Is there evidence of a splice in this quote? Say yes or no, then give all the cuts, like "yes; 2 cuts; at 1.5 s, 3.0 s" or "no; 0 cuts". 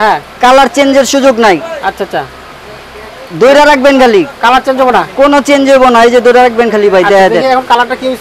no; 0 cuts